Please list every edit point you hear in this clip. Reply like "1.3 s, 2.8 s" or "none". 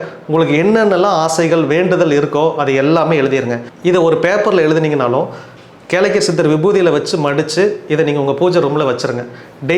3.6 s